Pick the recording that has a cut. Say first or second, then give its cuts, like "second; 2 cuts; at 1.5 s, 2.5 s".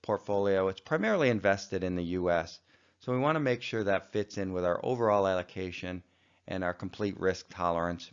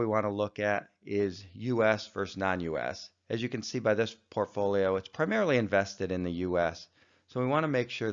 second; 1 cut; at 1.9 s